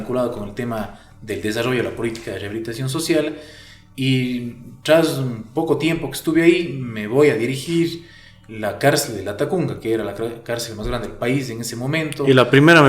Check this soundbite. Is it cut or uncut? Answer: uncut